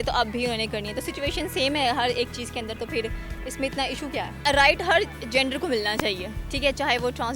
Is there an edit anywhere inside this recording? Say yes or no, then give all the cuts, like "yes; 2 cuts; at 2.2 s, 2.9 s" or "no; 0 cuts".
no; 0 cuts